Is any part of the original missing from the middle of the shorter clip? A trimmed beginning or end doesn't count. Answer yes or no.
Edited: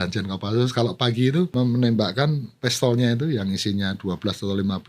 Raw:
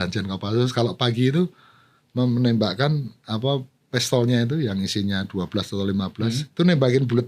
yes